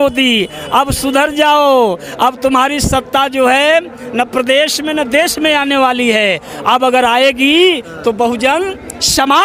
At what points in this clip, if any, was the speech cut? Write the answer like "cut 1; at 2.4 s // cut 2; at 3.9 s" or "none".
none